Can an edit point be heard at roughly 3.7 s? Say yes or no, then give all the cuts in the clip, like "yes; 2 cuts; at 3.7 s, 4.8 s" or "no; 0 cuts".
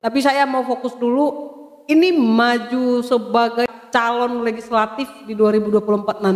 yes; 1 cut; at 3.7 s